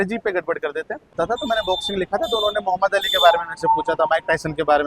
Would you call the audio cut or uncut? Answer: cut